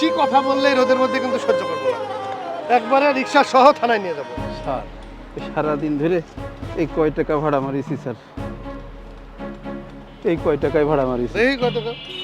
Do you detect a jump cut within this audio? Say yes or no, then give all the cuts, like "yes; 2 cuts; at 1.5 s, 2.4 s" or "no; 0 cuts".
no; 0 cuts